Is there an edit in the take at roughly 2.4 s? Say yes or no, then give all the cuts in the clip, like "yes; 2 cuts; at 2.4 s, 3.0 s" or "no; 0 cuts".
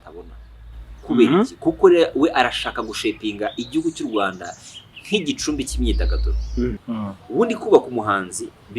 no; 1 cut; at 6.8 s